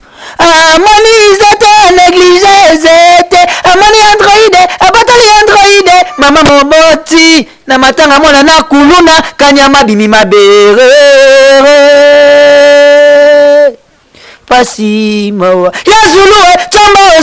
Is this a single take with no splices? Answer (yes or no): yes